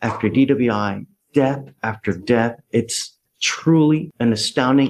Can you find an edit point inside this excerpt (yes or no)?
no